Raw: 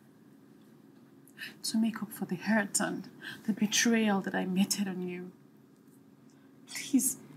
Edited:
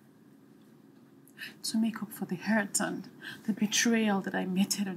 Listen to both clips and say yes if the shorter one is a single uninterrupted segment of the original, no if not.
yes